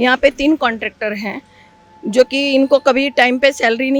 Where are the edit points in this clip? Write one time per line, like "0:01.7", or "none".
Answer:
none

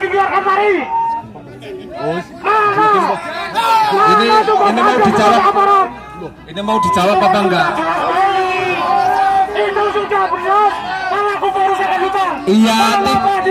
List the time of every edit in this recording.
none

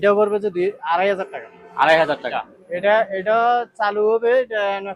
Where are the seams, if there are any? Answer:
0:02.3

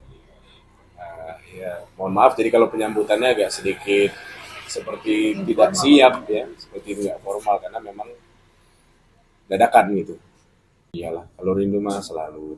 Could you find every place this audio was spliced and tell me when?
0:11.0

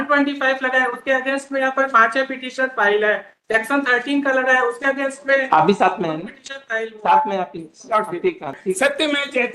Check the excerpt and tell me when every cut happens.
0:08.6

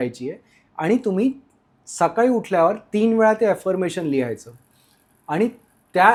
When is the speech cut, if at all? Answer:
none

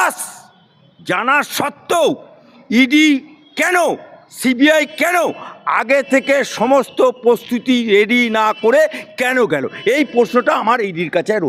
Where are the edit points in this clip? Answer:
none

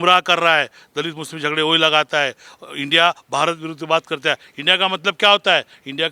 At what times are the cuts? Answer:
none

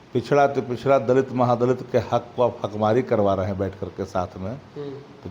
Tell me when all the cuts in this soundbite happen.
none

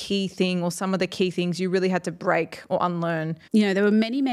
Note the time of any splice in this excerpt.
0:03.4

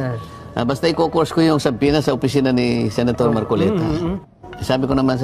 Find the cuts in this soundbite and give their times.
0:04.2

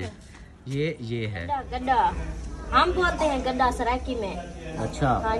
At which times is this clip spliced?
0:01.4

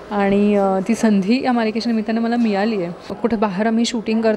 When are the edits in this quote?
0:03.1

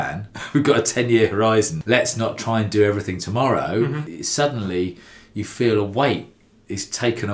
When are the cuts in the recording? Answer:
0:01.8
0:04.0

